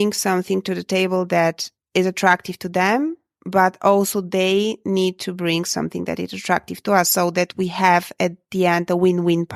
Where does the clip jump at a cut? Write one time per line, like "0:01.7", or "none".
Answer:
none